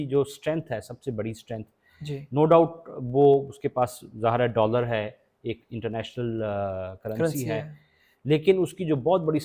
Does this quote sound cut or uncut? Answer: uncut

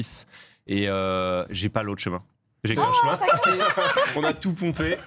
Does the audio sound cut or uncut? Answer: cut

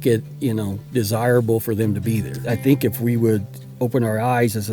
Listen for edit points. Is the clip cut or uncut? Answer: cut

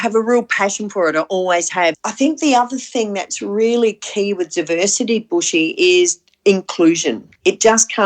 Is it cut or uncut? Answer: cut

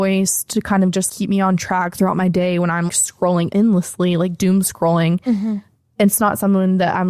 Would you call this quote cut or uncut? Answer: cut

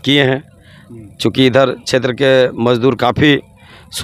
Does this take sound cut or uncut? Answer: uncut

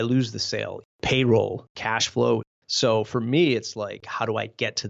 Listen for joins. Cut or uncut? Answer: cut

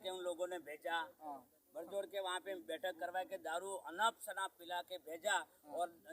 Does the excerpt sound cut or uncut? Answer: uncut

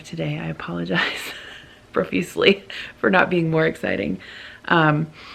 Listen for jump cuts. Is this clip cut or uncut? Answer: uncut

